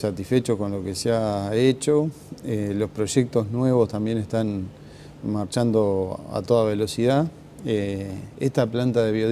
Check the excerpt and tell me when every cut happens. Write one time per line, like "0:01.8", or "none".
0:06.7